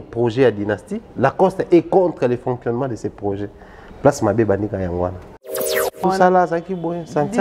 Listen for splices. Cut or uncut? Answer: cut